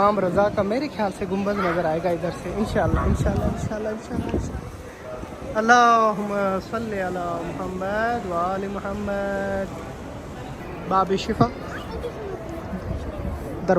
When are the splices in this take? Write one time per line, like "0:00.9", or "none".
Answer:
0:10.6